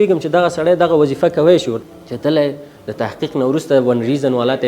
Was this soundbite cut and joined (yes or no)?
yes